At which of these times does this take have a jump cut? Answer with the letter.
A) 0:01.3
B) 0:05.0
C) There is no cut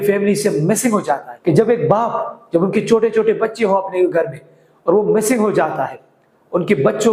A